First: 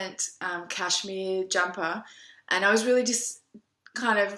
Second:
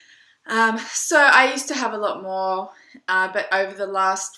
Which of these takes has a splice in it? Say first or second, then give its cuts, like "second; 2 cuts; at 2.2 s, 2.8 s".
first; 1 cut; at 3.4 s